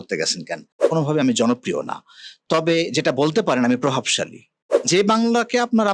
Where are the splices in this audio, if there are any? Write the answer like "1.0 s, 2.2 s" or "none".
0.9 s, 4.9 s